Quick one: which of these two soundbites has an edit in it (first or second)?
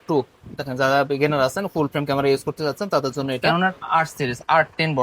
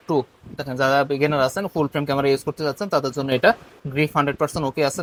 first